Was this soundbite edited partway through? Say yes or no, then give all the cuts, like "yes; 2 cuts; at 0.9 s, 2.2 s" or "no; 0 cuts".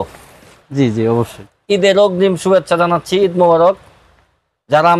yes; 1 cut; at 1.4 s